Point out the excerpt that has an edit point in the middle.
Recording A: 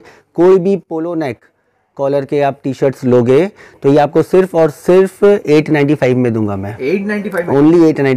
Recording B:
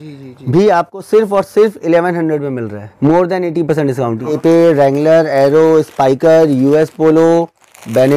B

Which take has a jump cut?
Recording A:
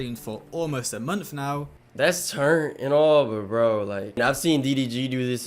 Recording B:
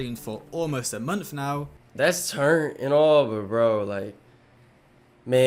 A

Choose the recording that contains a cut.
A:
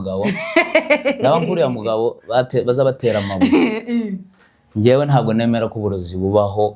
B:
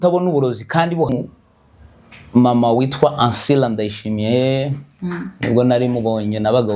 B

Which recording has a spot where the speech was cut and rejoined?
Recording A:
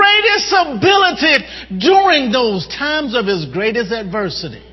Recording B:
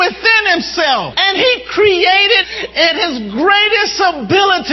B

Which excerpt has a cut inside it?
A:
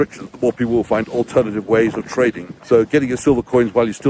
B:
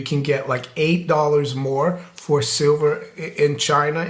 A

